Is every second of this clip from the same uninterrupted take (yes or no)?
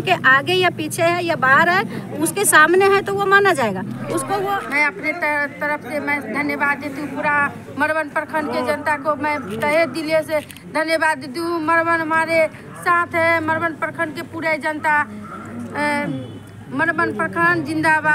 no